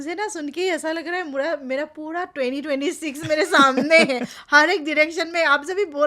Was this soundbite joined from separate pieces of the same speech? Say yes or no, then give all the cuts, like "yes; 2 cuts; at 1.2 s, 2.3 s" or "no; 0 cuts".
no; 0 cuts